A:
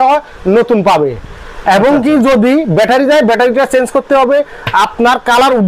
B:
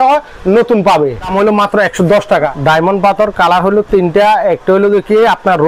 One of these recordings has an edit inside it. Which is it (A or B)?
B